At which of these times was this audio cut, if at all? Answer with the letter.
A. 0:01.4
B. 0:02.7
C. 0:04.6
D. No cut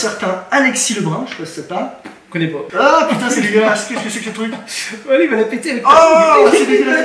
B